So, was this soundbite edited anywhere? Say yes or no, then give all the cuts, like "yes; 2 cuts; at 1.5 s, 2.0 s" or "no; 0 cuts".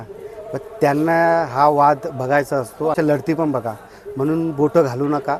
yes; 1 cut; at 2.9 s